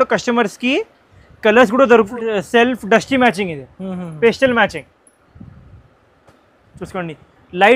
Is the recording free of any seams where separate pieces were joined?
no; 1 cut; at 2.0 s

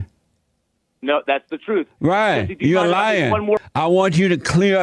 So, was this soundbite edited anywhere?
yes; 1 cut; at 3.7 s

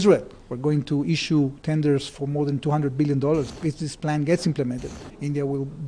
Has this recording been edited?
yes; 2 cuts; at 3.5 s, 4.9 s

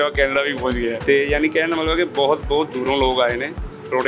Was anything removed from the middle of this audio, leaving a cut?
yes; 1 cut; at 1.0 s

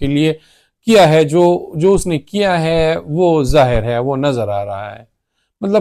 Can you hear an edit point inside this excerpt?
no; 0 cuts

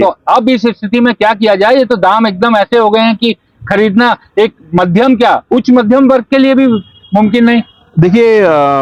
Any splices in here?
no; 0 cuts

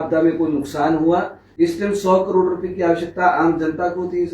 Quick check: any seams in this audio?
yes; 1 cut; at 1.4 s

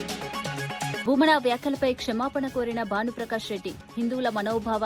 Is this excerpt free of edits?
no; 1 cut; at 1.0 s

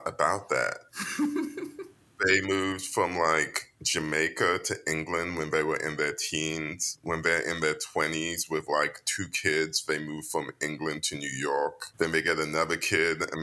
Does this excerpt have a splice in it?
yes; 1 cut; at 11.8 s

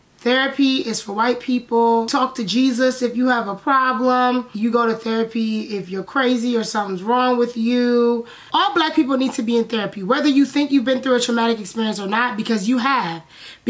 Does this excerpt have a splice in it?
yes; 3 cuts; at 2.1 s, 4.5 s, 8.3 s

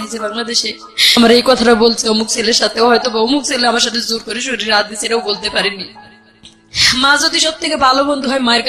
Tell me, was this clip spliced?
yes; 1 cut; at 1.2 s

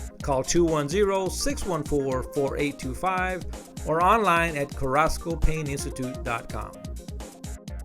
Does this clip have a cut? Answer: yes; 1 cut; at 6.7 s

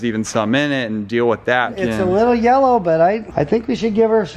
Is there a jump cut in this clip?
yes; 2 cuts; at 1.7 s, 3.3 s

